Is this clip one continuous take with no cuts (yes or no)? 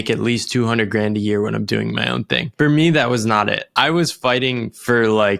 no